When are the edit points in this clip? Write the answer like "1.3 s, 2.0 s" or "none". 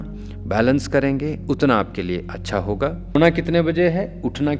3.1 s